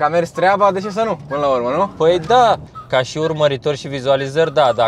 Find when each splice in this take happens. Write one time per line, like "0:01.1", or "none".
0:02.7